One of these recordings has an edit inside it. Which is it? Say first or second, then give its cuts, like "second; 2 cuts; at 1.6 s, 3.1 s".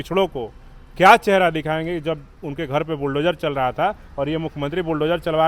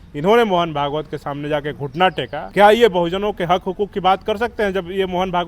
second; 1 cut; at 2.4 s